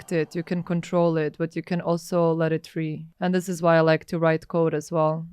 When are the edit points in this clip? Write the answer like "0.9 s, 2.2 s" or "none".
3.0 s